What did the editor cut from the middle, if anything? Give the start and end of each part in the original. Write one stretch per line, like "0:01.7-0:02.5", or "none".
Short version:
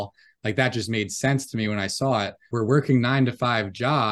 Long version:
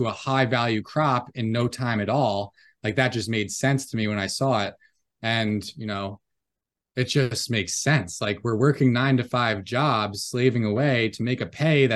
0:04.9-0:08.4